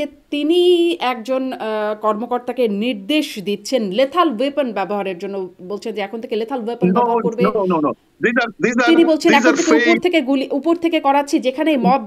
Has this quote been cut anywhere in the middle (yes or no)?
no